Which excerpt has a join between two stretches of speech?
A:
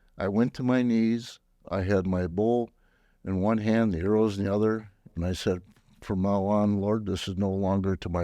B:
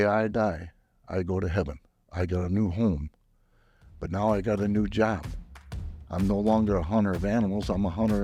A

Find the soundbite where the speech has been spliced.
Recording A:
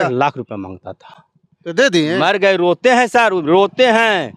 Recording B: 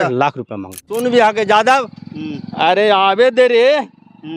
B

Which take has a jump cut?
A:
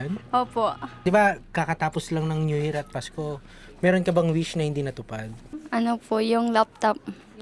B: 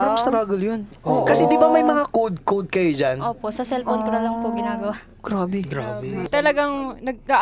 A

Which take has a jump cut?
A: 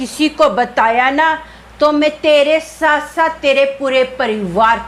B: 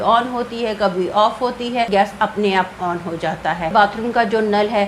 B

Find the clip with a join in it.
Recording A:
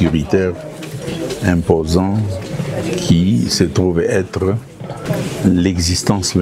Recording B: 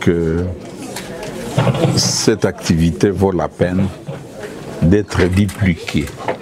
A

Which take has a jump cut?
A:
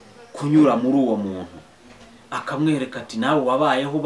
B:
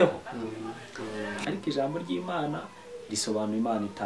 B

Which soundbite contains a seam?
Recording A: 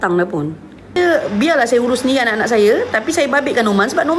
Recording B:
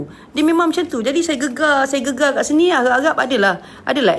A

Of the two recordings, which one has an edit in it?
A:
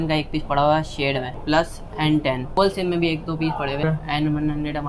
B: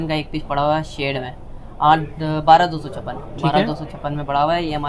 A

